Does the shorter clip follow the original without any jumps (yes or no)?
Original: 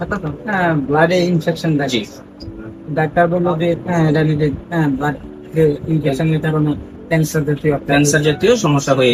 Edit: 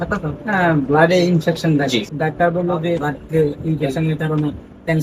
no